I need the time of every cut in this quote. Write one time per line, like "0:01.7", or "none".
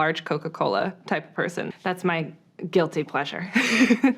0:01.7